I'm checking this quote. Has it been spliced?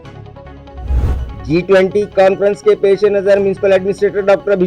no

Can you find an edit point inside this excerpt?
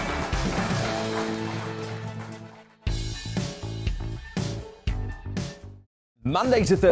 yes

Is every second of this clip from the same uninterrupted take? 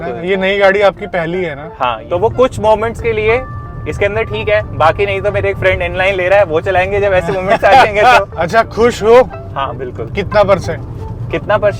no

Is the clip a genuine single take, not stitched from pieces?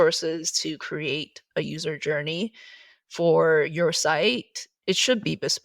no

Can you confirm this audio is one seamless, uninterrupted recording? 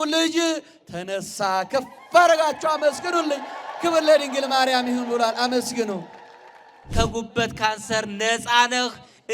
no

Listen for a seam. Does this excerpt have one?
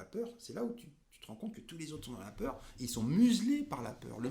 no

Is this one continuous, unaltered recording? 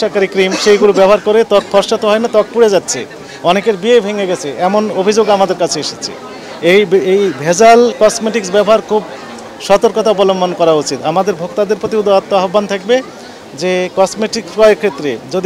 yes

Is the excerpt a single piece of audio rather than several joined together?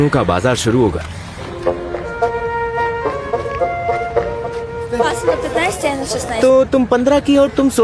yes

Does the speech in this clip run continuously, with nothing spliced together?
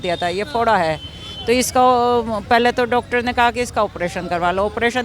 yes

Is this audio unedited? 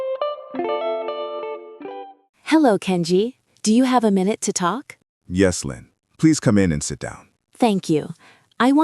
no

